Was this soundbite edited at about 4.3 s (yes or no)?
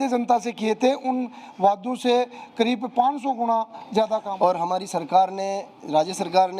yes